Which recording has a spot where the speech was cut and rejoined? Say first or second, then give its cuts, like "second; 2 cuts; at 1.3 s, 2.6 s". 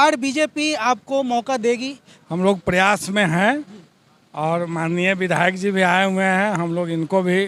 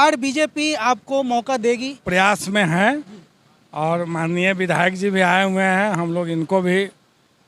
second; 1 cut; at 2.0 s